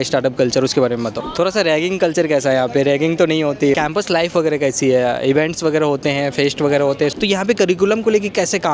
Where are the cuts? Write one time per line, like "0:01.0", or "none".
0:01.2
0:03.8
0:07.1